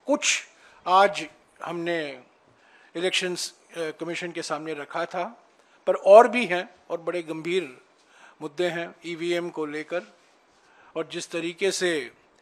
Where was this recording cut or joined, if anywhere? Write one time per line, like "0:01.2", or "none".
none